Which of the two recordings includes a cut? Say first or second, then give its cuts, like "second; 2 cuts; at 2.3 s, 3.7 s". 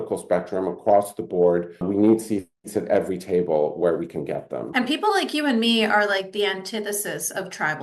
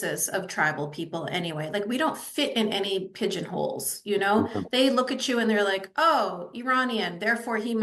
first; 2 cuts; at 1.8 s, 4.7 s